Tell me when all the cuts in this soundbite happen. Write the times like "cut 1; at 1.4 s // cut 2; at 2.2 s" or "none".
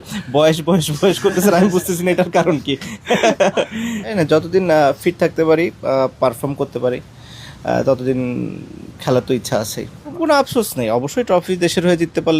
cut 1; at 4.1 s // cut 2; at 10.1 s